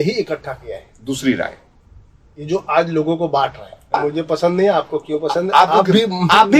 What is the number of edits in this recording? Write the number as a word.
one